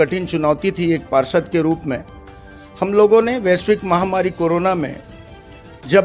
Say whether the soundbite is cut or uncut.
uncut